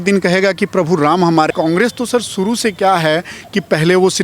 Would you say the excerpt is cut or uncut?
cut